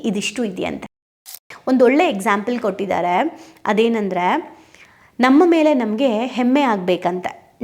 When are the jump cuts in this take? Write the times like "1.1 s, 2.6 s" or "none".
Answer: 1.5 s